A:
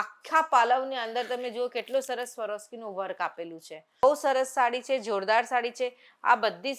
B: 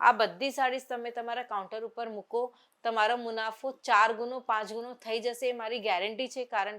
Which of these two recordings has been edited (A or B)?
A